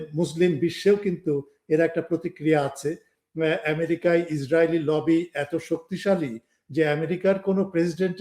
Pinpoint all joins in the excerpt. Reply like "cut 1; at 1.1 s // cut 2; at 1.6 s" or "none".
cut 1; at 3.1 s